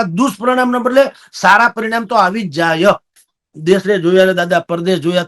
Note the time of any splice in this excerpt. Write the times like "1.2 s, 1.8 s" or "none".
3.5 s